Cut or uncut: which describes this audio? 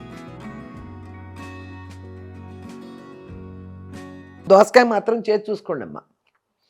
cut